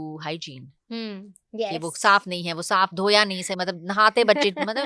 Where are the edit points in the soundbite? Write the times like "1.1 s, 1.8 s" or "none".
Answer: none

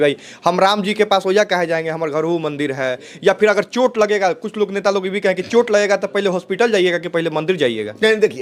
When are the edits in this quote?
none

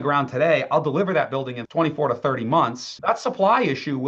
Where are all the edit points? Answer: 1.6 s, 3.0 s

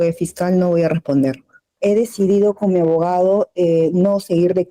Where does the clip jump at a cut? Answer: 1.6 s

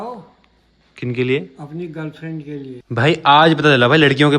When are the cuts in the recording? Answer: 2.8 s

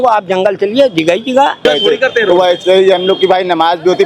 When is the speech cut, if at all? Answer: 1.6 s

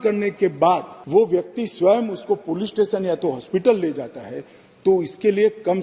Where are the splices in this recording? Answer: 0.9 s

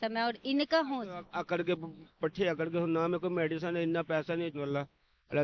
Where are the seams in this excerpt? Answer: 4.5 s

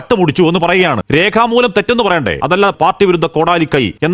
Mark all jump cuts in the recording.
1.0 s, 2.7 s

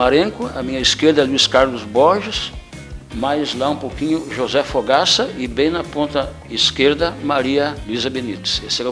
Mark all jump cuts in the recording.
7.8 s

